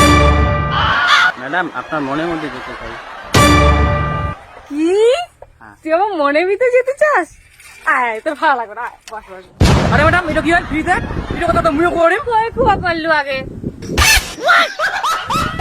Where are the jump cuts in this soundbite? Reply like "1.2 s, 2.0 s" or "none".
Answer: 0.9 s, 9.9 s

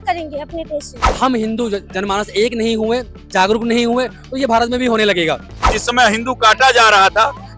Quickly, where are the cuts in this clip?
1.0 s, 5.7 s

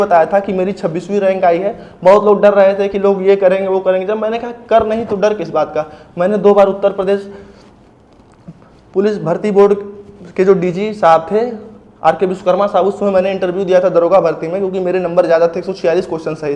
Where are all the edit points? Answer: none

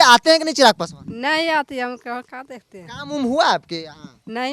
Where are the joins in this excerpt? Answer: none

